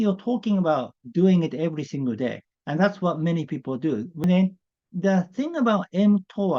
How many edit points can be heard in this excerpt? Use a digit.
1